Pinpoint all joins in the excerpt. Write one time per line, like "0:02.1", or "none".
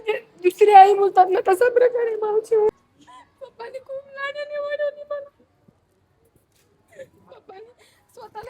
0:02.7